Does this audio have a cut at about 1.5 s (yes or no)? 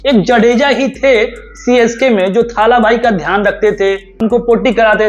no